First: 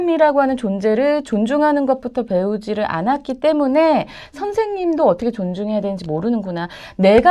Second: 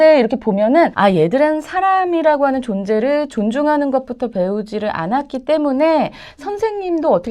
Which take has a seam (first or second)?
second